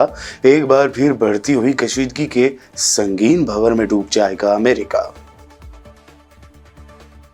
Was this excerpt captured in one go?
yes; 0 cuts

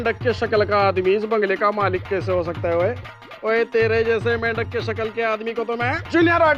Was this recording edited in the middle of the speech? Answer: no; 0 cuts

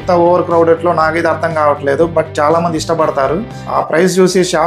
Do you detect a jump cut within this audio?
yes; 1 cut; at 3.6 s

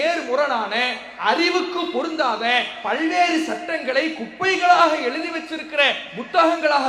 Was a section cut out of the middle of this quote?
no; 0 cuts

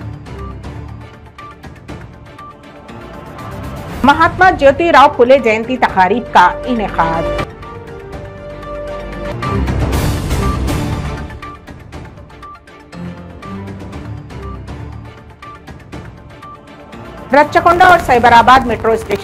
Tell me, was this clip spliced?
no; 0 cuts

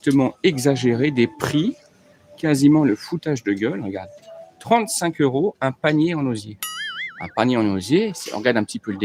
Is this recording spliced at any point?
no; 0 cuts

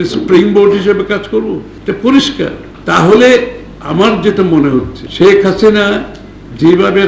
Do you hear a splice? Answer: yes; 3 cuts; at 1.7 s, 2.7 s, 5.0 s

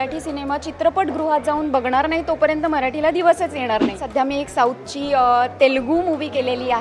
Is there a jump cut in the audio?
yes; 1 cut; at 4.0 s

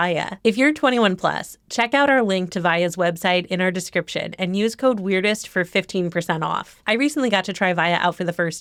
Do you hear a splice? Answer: no; 0 cuts

